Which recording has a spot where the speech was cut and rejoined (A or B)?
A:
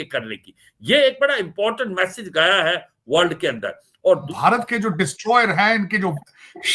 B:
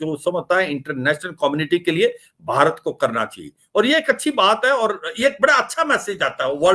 A